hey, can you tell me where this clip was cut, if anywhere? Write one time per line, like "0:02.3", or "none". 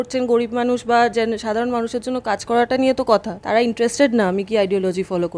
0:03.4